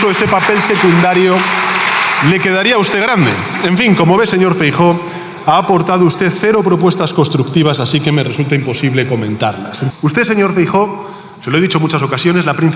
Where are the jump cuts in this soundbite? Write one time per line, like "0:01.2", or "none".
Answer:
0:09.8